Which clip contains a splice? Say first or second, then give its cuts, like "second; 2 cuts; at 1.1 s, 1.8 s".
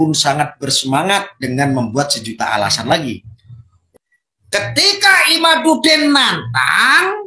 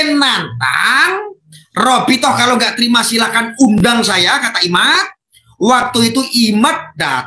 first; 1 cut; at 3.8 s